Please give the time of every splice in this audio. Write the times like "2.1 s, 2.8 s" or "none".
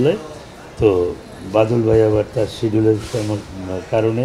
none